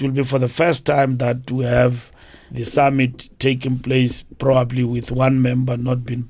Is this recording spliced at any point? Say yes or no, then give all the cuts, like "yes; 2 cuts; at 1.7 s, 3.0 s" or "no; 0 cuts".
no; 0 cuts